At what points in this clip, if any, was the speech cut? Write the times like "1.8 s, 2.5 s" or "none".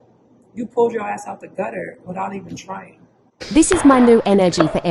3.3 s